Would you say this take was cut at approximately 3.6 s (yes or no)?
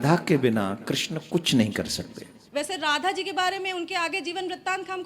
no